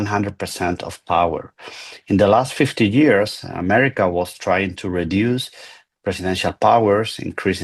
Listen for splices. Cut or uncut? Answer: uncut